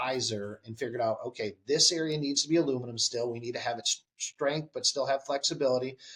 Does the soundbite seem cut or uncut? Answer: uncut